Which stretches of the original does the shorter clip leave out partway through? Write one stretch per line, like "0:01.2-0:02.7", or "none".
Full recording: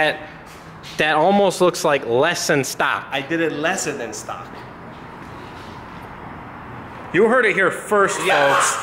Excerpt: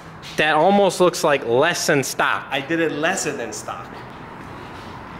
0:04.7-0:04.9